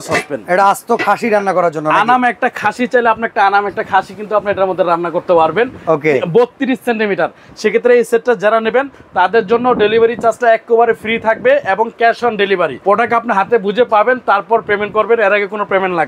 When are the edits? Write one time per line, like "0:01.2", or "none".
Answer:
0:07.5
0:12.8